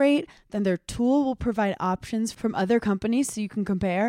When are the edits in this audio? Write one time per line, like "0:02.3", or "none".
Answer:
none